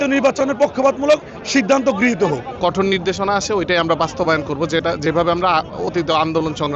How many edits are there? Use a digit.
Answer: 1